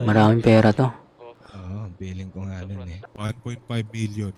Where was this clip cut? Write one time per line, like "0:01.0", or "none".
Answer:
0:02.9